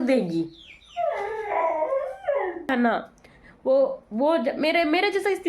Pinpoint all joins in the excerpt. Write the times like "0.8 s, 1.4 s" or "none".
2.7 s